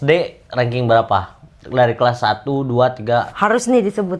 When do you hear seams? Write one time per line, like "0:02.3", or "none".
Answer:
none